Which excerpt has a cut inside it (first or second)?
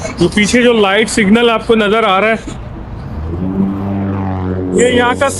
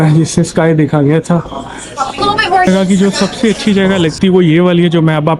second